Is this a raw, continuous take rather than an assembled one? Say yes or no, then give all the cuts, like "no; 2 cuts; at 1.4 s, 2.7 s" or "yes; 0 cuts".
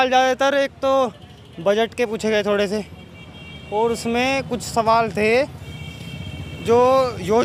yes; 0 cuts